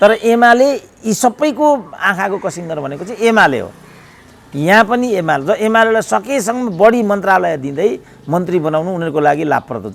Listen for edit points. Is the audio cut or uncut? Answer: uncut